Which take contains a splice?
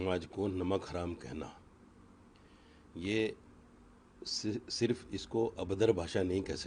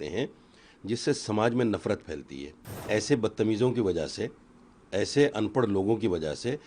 second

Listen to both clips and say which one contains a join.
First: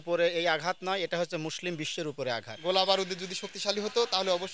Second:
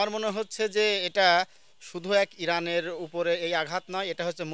first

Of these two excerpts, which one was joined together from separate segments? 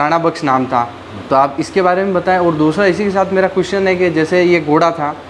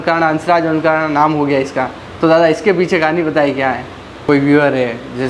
second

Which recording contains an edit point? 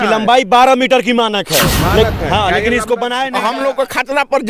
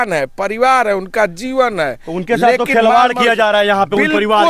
first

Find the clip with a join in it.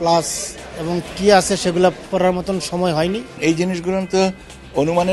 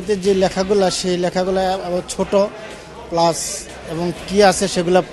first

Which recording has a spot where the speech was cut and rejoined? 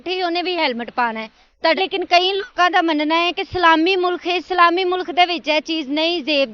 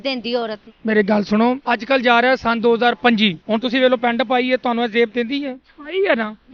first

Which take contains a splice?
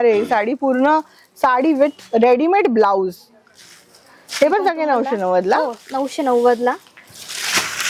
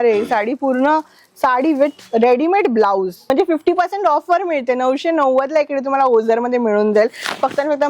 second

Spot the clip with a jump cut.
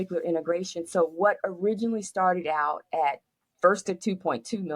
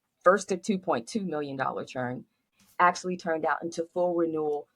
second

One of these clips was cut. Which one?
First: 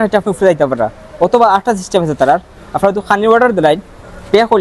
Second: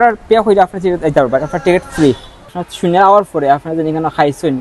second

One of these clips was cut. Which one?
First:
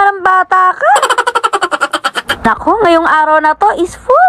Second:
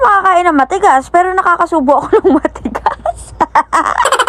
first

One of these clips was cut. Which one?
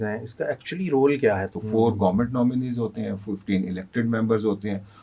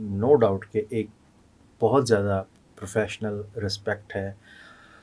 first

